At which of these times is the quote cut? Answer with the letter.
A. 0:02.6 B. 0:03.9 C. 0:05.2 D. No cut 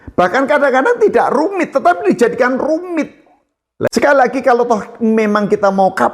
B